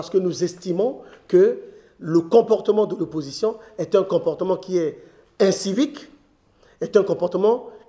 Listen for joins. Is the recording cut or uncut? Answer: uncut